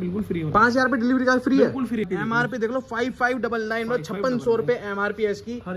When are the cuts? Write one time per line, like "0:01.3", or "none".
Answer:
0:02.1